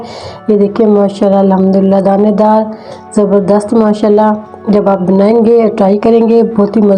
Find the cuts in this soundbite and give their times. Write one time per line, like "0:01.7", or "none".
none